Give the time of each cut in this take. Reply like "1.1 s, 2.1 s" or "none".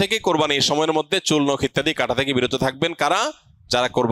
none